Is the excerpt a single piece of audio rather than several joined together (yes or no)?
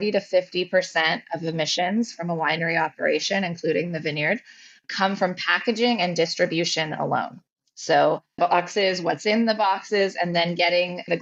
yes